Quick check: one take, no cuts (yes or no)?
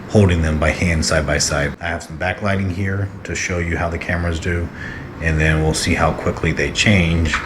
no